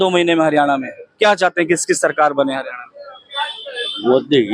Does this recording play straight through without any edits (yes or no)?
yes